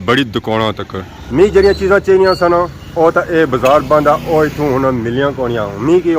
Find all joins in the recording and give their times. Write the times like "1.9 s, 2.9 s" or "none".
none